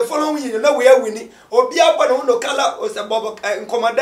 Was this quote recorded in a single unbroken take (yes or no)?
yes